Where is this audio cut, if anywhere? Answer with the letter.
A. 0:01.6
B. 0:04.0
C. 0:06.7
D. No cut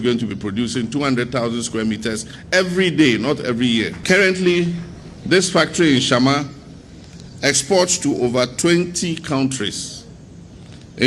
B